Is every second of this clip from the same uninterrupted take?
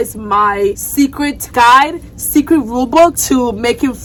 yes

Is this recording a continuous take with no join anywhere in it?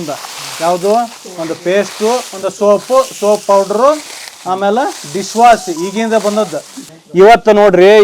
no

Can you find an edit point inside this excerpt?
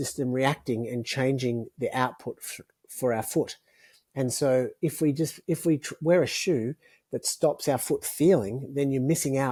no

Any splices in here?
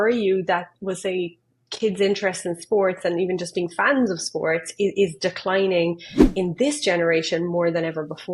no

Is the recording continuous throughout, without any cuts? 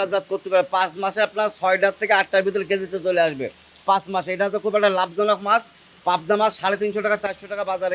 yes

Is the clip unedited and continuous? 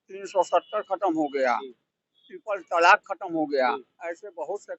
yes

